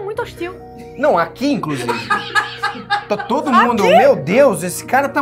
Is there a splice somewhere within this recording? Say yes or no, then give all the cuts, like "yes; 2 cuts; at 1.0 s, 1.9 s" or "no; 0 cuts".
no; 0 cuts